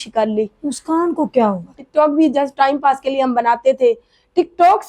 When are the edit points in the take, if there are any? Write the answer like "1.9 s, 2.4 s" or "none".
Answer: 1.8 s